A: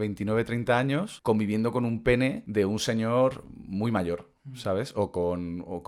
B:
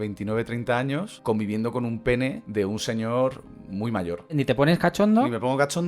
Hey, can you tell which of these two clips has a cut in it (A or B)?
B